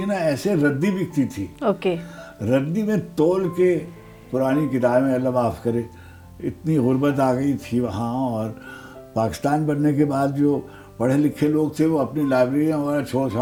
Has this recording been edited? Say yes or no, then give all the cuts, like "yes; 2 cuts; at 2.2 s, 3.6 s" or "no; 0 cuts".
no; 0 cuts